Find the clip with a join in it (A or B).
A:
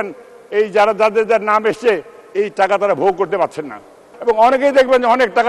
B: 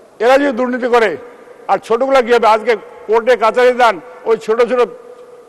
A